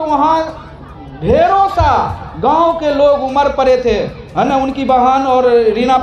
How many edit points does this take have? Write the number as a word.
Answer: zero